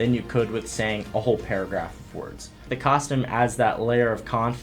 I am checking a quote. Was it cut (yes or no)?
yes